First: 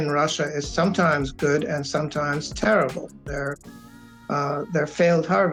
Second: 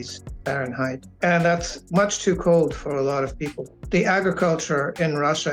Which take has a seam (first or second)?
second